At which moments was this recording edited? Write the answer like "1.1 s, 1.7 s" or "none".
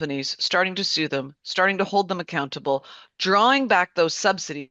none